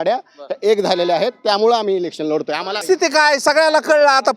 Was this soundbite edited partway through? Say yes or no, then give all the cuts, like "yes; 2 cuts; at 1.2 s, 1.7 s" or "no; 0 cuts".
yes; 1 cut; at 2.8 s